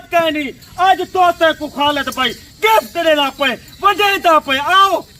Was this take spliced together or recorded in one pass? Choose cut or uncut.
uncut